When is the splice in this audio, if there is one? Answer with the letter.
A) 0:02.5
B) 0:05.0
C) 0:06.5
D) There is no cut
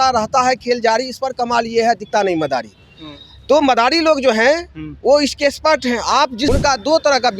C